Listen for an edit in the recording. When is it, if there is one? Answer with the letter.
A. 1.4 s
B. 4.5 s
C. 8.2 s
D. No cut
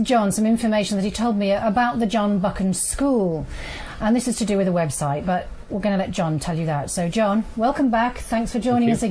B